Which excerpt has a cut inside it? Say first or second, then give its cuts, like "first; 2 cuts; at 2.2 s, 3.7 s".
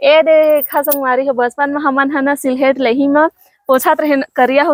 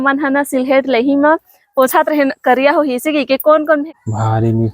second; 1 cut; at 3.8 s